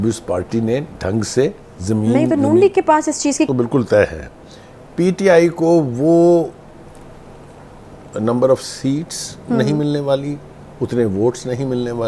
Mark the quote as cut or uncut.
cut